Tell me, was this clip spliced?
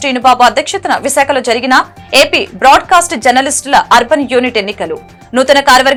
no; 0 cuts

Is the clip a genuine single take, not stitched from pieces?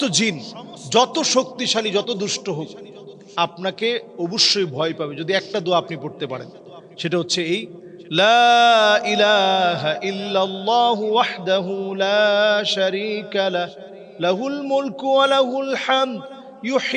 yes; 0 cuts

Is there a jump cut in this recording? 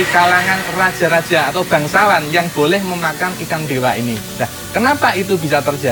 no; 0 cuts

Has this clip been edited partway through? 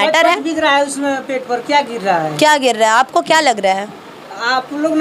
no; 0 cuts

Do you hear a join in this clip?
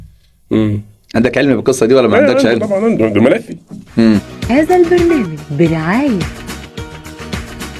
yes; 1 cut; at 4.3 s

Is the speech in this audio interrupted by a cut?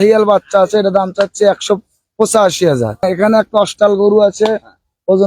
yes; 1 cut; at 3.0 s

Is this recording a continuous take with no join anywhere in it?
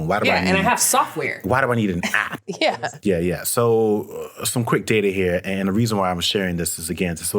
no; 1 cut; at 2.7 s

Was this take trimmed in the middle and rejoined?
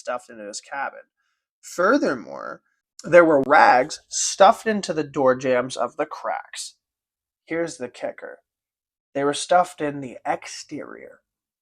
yes; 1 cut; at 3.4 s

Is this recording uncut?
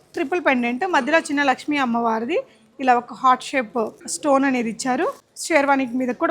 no; 2 cuts; at 4.0 s, 5.3 s

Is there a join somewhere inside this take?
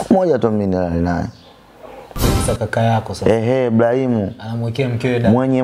yes; 1 cut; at 2.2 s

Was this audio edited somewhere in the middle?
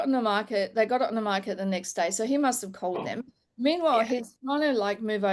no; 0 cuts

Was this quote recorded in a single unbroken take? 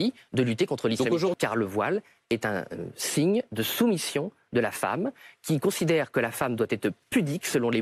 no; 1 cut; at 1.4 s

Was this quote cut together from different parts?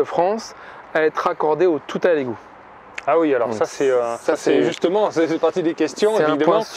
no; 0 cuts

